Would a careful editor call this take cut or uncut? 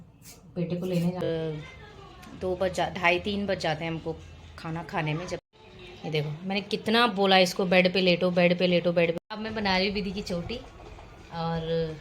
cut